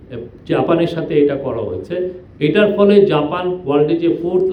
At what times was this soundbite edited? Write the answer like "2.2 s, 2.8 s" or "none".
none